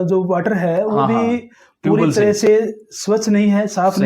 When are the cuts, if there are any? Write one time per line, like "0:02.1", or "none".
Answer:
none